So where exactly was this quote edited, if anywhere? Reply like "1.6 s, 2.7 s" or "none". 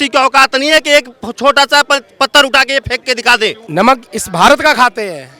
3.6 s